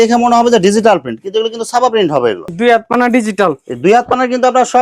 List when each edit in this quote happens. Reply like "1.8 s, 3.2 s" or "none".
2.5 s